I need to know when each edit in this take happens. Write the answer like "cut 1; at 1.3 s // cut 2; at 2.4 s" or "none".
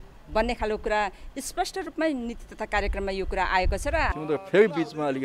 cut 1; at 4.2 s